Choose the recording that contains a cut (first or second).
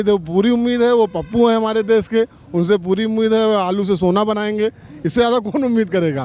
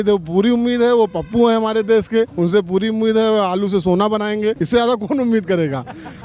second